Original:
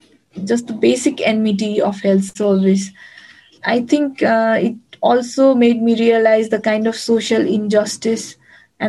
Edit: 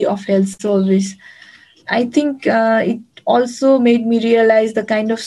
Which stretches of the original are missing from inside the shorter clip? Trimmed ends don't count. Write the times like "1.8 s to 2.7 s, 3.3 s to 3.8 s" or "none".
none